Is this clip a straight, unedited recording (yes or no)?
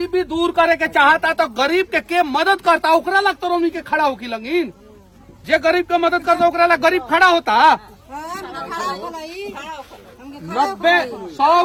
yes